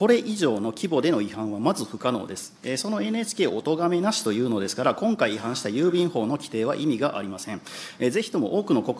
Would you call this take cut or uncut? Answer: uncut